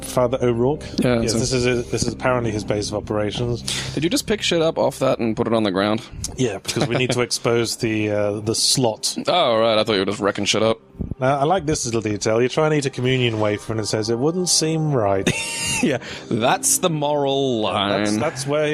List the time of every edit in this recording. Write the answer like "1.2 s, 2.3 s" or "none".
none